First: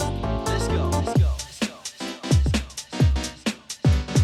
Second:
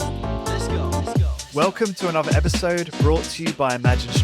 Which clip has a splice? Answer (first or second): second